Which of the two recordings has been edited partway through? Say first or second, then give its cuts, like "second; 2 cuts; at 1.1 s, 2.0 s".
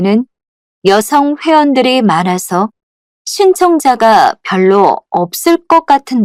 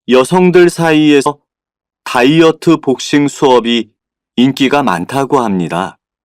second; 1 cut; at 1.3 s